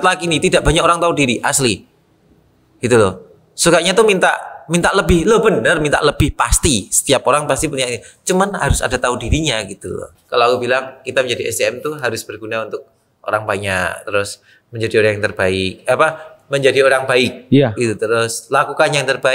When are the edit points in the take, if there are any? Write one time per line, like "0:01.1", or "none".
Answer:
0:10.1